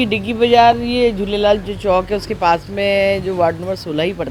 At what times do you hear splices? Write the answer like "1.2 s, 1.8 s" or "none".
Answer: none